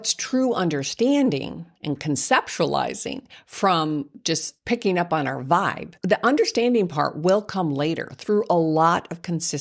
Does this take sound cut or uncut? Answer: cut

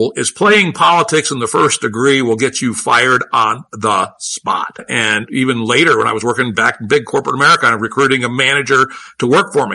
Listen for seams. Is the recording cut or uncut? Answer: uncut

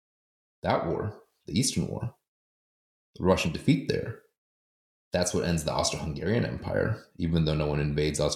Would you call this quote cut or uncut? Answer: uncut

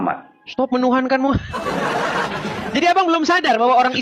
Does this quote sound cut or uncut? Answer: cut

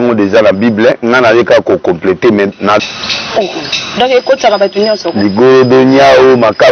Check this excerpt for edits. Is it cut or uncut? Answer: cut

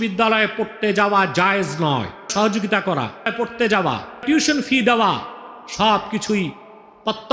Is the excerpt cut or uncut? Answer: cut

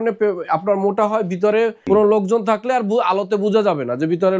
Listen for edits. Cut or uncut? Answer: cut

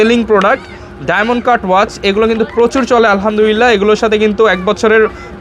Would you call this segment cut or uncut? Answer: uncut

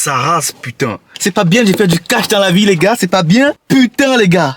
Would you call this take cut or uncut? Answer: cut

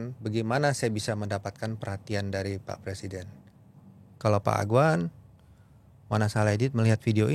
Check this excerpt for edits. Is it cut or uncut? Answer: cut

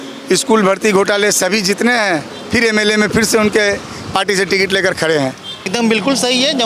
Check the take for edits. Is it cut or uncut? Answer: cut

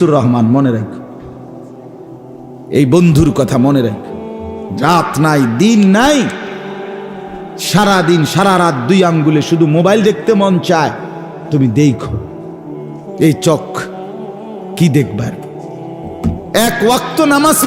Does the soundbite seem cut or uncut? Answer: uncut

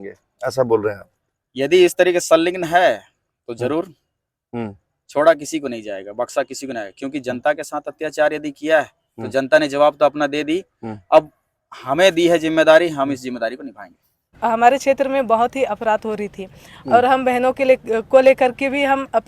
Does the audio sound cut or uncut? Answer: cut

